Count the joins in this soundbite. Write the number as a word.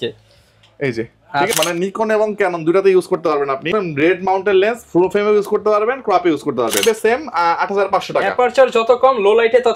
three